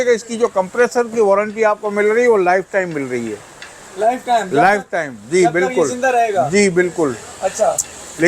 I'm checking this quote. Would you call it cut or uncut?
uncut